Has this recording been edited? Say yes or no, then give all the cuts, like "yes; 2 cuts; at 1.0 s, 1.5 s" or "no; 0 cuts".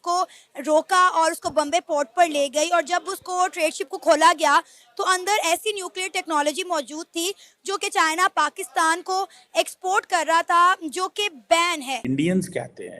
yes; 1 cut; at 12.0 s